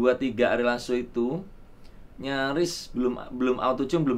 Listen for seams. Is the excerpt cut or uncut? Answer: uncut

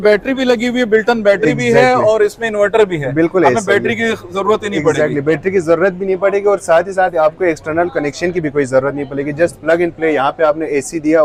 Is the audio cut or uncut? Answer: uncut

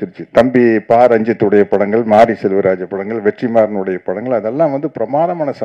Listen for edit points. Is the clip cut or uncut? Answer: uncut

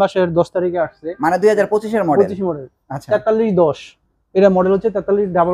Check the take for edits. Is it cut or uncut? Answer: uncut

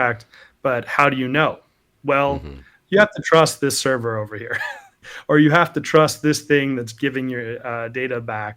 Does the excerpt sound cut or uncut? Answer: uncut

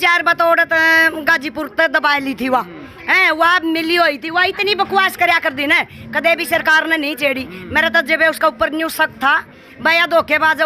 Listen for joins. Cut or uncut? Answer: uncut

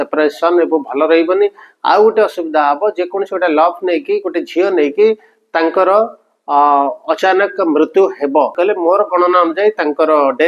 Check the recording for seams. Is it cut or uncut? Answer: cut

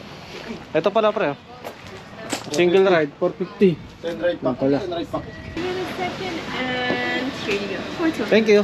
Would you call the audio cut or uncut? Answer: cut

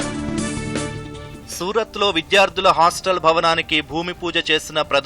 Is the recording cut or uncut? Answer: cut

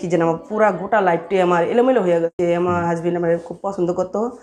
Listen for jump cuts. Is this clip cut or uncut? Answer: cut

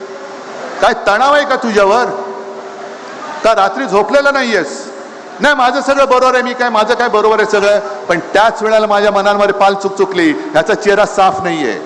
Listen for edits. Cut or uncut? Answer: uncut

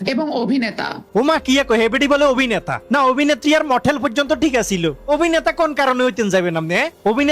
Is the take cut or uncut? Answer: uncut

